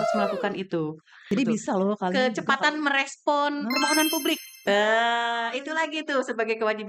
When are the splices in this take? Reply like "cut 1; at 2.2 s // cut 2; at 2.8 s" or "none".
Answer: cut 1; at 1.3 s

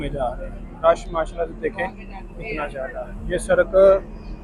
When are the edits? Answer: none

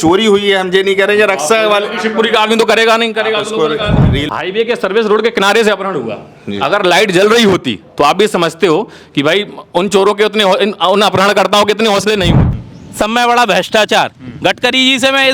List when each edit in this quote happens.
cut 1; at 4.2 s // cut 2; at 12.5 s

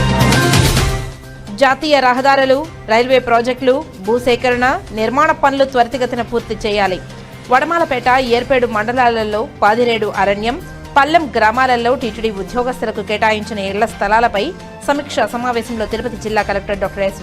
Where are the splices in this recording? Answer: cut 1; at 1.0 s

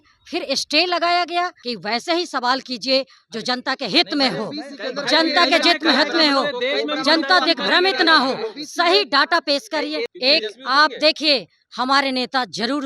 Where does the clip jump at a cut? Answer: cut 1; at 1.6 s // cut 2; at 10.1 s

